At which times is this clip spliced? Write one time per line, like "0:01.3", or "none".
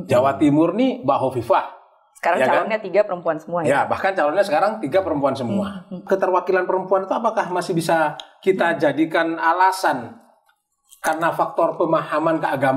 0:06.0